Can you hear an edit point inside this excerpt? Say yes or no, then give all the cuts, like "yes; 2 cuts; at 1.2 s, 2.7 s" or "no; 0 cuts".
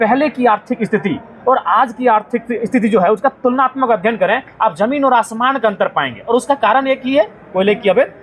no; 0 cuts